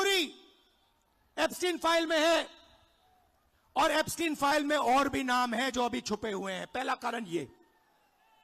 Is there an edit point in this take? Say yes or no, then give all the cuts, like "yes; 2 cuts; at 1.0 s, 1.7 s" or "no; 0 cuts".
no; 0 cuts